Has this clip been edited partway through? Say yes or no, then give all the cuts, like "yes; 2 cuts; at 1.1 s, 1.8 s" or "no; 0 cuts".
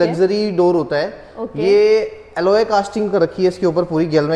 no; 0 cuts